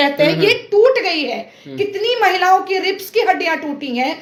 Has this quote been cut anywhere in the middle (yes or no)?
no